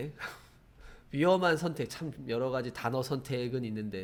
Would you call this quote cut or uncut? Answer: uncut